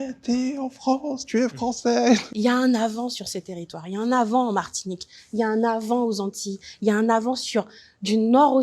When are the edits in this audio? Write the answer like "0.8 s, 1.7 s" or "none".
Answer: 2.2 s